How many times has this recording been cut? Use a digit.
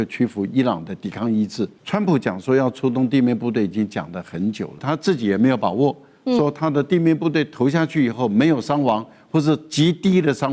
2